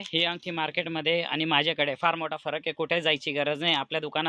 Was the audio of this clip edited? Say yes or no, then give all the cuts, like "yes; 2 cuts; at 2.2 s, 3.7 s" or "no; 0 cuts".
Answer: no; 0 cuts